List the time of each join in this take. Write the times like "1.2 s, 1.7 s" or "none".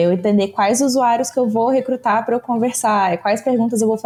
none